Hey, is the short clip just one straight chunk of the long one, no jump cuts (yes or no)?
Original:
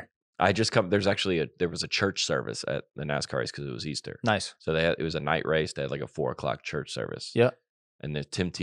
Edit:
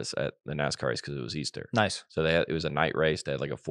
yes